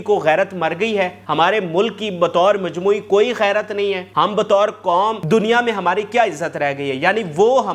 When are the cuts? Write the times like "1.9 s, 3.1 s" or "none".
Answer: 1.2 s, 4.0 s, 5.2 s

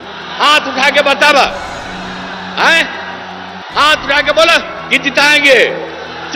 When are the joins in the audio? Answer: none

